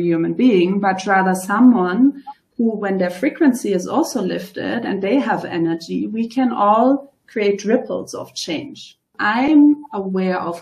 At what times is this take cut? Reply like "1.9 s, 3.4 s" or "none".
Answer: 9.1 s